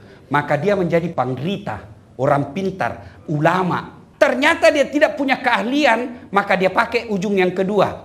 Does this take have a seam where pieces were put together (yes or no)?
yes